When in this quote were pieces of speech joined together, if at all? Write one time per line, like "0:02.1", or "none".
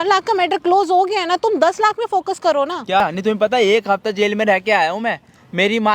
0:03.0